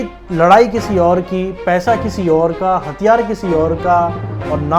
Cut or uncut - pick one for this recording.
uncut